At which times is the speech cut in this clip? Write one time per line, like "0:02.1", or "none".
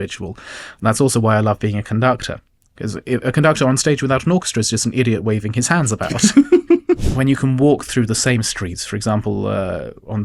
0:07.0